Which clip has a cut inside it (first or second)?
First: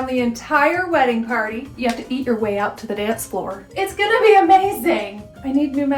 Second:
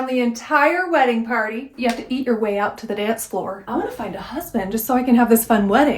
second